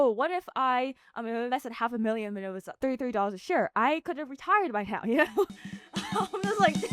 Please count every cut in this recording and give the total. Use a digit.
1